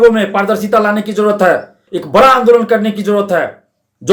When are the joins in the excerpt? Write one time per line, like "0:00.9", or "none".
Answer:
0:01.9